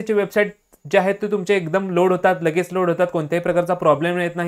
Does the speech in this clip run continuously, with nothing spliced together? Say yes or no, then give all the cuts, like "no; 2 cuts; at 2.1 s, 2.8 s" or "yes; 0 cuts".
yes; 0 cuts